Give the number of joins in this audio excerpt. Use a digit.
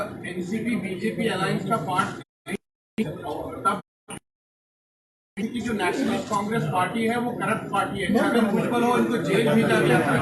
1